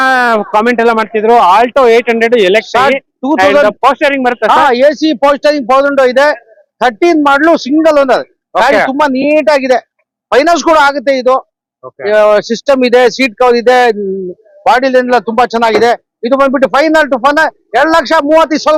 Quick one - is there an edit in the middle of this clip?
no; 0 cuts

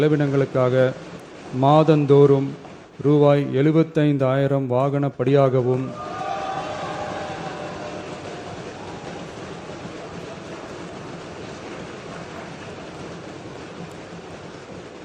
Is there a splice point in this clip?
no; 0 cuts

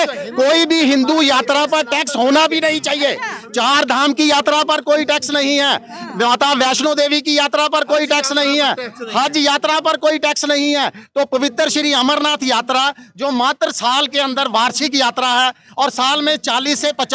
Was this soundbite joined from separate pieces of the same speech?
no; 0 cuts

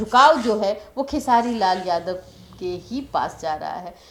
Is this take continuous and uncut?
yes; 0 cuts

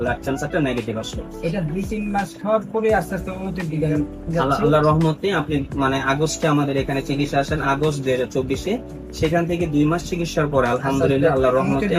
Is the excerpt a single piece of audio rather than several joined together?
yes; 0 cuts

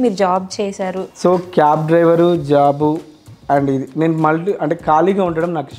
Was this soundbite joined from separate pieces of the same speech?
yes; 1 cut; at 1.0 s

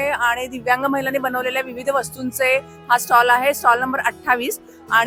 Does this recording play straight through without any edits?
yes; 0 cuts

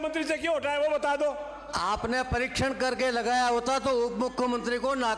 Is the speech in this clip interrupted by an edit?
no; 0 cuts

